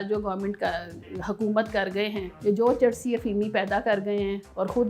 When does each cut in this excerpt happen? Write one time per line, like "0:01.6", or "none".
0:02.3